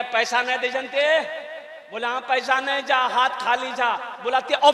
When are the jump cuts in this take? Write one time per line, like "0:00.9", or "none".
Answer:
none